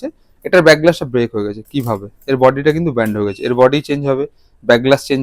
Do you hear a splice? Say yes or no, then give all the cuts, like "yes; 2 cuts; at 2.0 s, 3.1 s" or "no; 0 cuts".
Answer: no; 0 cuts